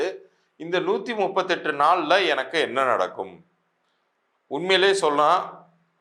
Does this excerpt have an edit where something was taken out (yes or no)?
no